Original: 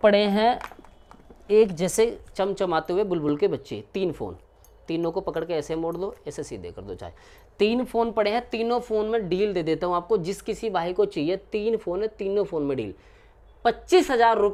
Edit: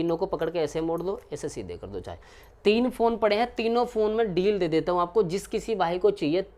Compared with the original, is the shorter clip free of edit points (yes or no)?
yes